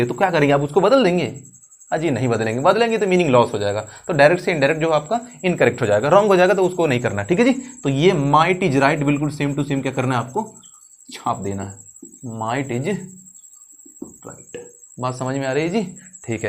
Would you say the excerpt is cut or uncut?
uncut